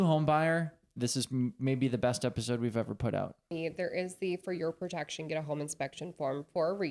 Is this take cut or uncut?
cut